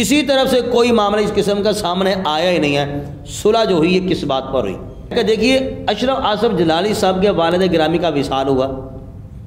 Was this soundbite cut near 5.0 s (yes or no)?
yes